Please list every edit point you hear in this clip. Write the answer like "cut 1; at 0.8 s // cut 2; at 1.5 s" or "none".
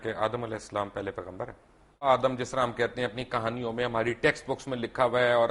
cut 1; at 2.0 s

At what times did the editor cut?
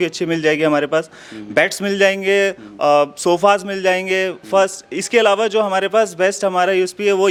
none

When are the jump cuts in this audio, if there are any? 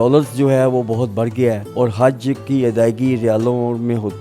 cut 1; at 1.6 s

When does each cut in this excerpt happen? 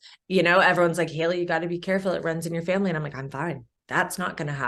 cut 1; at 3.7 s

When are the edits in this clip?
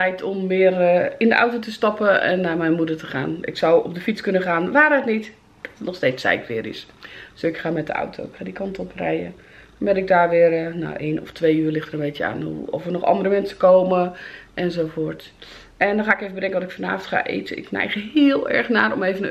none

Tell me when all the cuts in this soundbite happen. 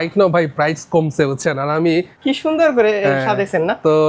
cut 1; at 2.1 s

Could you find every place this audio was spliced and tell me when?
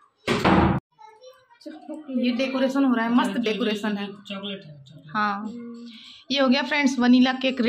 cut 1; at 0.9 s

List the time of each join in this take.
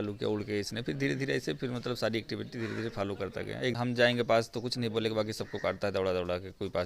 cut 1; at 3.7 s

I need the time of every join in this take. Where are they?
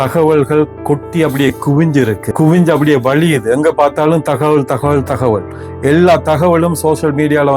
cut 1; at 2.2 s

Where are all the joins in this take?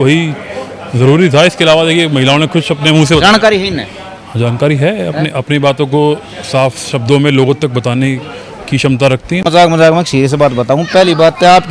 cut 1; at 9.4 s

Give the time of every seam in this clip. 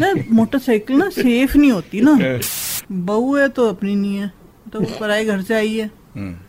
cut 1; at 2.7 s

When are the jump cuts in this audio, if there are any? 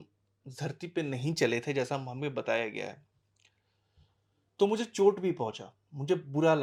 none

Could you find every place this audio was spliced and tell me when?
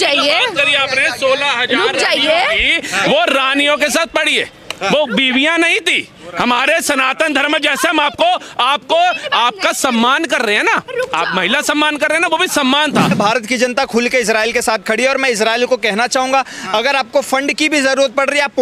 cut 1; at 13.1 s

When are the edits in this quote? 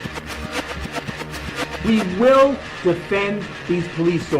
cut 1; at 1.8 s

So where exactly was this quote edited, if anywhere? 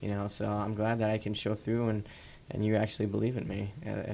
none

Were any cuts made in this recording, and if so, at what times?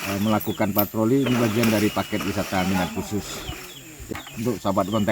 cut 1; at 4.1 s

